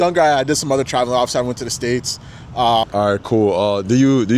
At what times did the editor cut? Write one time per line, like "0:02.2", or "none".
0:02.9